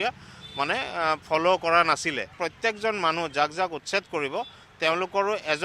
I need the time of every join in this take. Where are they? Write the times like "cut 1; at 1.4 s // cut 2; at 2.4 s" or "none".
cut 1; at 2.3 s